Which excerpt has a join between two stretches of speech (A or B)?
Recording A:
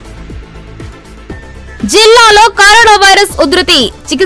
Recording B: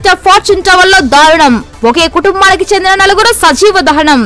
A